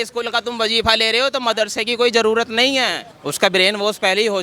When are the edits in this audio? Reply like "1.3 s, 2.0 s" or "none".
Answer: 3.0 s

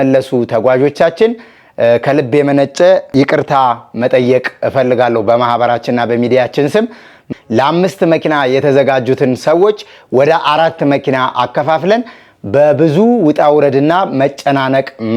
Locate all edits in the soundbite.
7.2 s

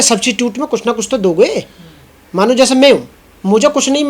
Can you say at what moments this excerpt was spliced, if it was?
none

